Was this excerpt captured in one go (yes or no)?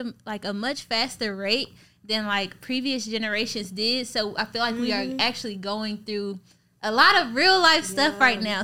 yes